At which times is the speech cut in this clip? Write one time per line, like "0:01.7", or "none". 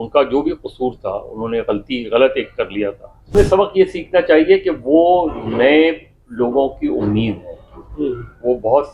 0:03.3